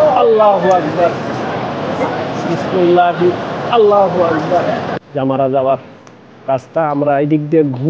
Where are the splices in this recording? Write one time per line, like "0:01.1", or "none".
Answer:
0:05.0